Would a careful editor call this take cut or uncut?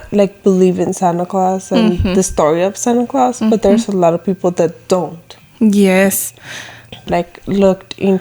cut